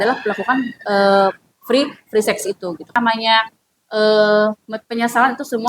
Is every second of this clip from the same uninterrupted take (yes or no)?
no